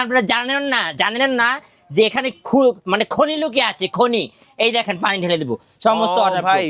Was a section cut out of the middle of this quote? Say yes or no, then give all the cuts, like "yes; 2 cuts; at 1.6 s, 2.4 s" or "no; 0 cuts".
no; 0 cuts